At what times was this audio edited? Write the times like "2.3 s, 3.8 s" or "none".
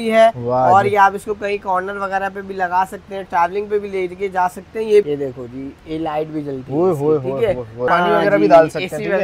5.1 s, 7.8 s